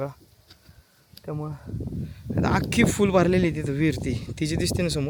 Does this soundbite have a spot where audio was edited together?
no; 0 cuts

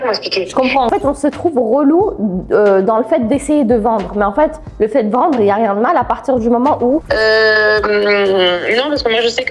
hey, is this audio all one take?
no; 2 cuts; at 0.9 s, 7.0 s

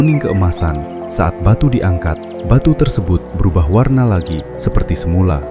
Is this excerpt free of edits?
yes; 0 cuts

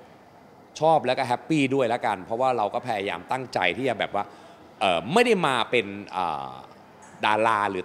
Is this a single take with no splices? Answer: yes; 0 cuts

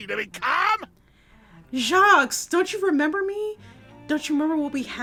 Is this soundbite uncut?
yes; 0 cuts

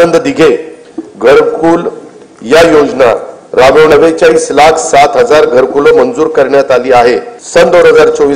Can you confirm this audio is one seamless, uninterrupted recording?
no; 2 cuts; at 3.9 s, 7.3 s

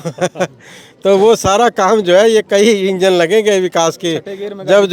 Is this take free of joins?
yes; 0 cuts

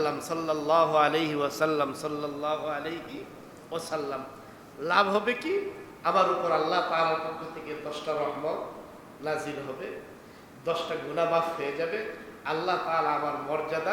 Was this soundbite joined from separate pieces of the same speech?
no; 0 cuts

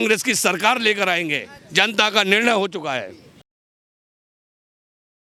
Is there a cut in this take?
no; 0 cuts

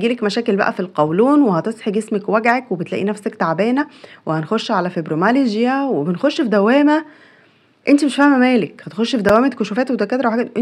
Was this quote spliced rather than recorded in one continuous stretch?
no; 0 cuts

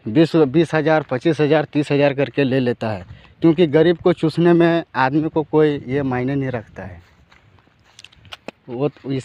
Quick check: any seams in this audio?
no; 0 cuts

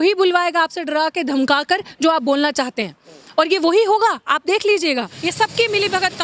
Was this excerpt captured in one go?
yes; 0 cuts

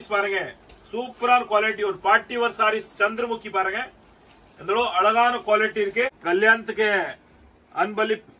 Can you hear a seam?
yes; 1 cut; at 6.2 s

